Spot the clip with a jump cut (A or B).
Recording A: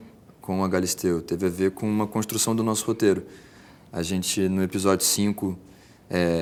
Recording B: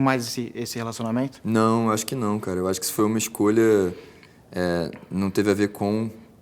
B